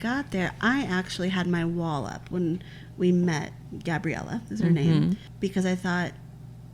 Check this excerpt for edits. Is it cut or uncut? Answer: uncut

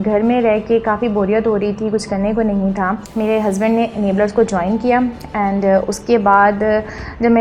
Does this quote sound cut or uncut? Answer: cut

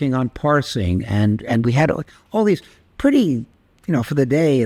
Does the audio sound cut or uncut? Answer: uncut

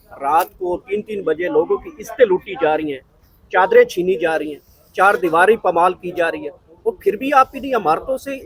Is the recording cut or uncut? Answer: uncut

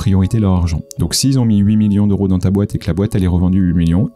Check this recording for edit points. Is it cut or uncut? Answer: uncut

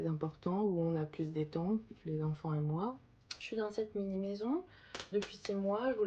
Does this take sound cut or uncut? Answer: cut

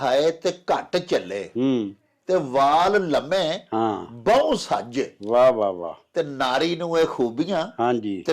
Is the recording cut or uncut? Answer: uncut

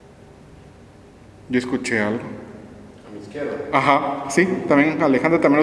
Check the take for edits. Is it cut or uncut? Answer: uncut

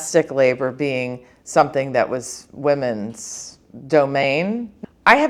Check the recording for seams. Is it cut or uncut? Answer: uncut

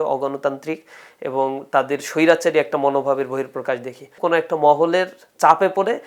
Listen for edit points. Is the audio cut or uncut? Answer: cut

